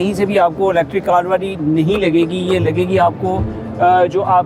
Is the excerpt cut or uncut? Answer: uncut